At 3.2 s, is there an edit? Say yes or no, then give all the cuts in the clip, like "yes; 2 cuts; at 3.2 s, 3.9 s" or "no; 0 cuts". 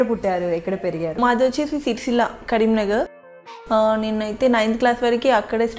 yes; 2 cuts; at 1.2 s, 3.2 s